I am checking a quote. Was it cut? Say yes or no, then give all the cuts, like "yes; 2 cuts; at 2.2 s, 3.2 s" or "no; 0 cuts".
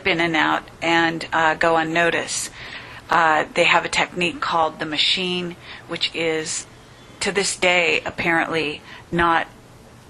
yes; 1 cut; at 1.7 s